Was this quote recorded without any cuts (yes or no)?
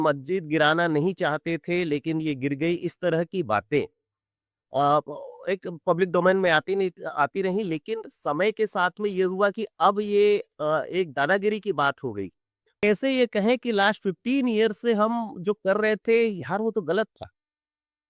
no